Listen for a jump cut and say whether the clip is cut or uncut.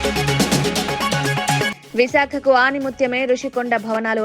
cut